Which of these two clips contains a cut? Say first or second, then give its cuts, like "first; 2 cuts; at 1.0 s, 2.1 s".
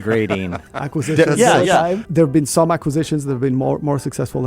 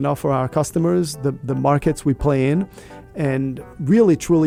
first; 1 cut; at 2.0 s